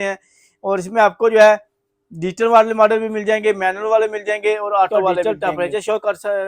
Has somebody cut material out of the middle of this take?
yes; 1 cut; at 4.9 s

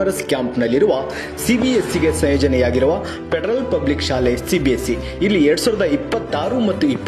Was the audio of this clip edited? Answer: no; 0 cuts

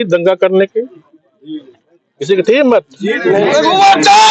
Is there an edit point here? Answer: no; 0 cuts

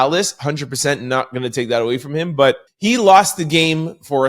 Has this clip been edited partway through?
yes; 1 cut; at 2.7 s

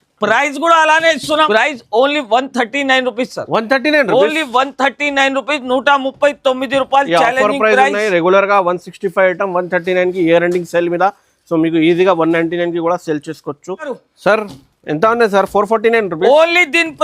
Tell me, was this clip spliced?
yes; 2 cuts; at 1.5 s, 13.9 s

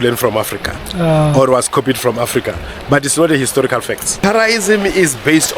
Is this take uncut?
no; 1 cut; at 4.1 s

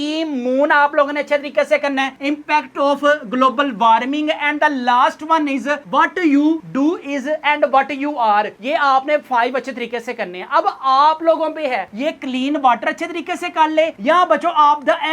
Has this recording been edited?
no; 0 cuts

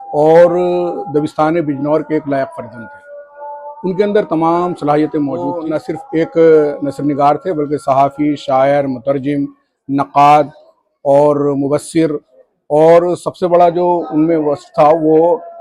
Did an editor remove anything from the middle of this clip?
no; 0 cuts

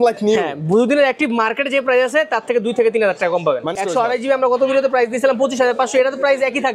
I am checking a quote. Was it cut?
yes; 1 cut; at 3.8 s

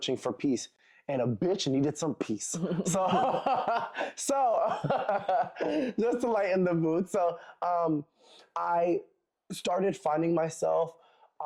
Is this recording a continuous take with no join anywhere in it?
yes; 0 cuts

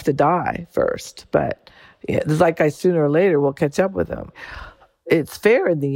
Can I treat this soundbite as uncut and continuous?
no; 1 cut; at 5.1 s

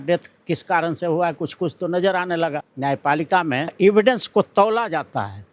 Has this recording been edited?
yes; 2 cuts; at 2.7 s, 3.7 s

